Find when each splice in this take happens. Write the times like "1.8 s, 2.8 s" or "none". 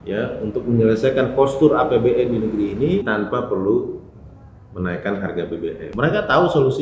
3.0 s, 5.9 s